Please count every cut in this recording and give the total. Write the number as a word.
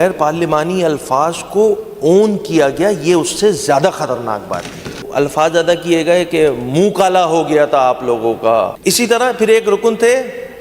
two